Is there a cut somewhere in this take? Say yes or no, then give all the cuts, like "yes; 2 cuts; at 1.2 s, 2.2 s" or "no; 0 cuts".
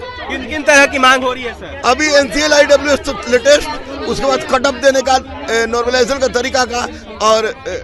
no; 0 cuts